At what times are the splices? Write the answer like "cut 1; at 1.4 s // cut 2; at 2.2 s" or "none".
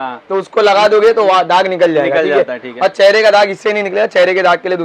none